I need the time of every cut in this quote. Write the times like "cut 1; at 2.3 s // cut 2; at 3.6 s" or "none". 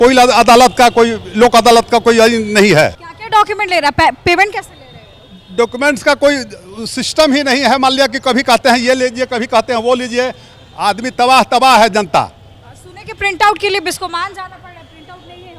none